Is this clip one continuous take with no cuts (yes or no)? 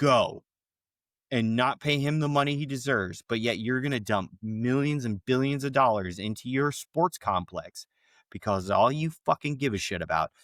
yes